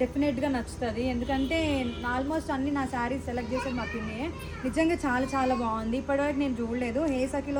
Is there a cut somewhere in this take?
no; 0 cuts

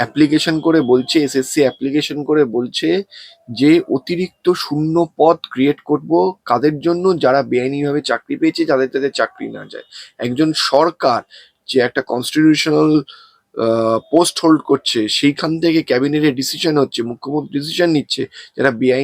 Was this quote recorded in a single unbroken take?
yes; 0 cuts

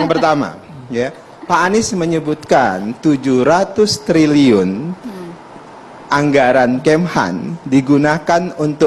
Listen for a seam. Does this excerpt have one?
no; 0 cuts

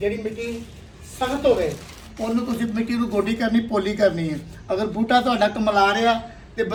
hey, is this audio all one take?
yes; 0 cuts

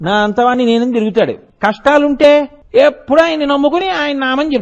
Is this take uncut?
no; 2 cuts; at 1.5 s, 2.6 s

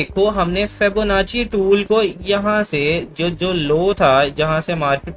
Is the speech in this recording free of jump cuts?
yes; 0 cuts

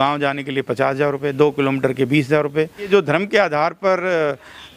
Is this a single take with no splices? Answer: no; 1 cut; at 2.9 s

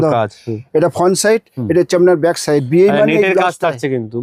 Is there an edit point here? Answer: no; 0 cuts

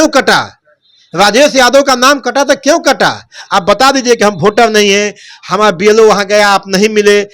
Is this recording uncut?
yes; 0 cuts

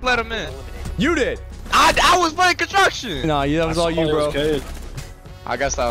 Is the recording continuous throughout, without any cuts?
no; 1 cut; at 1.5 s

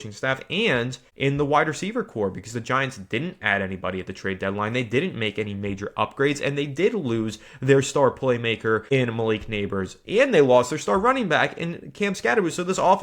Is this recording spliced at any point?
yes; 2 cuts; at 1.0 s, 8.8 s

